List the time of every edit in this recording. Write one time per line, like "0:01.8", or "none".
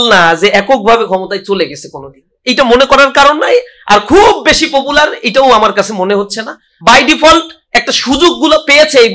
0:06.7